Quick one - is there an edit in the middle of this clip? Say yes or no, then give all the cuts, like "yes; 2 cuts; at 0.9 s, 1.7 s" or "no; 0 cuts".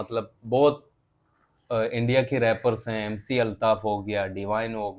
no; 0 cuts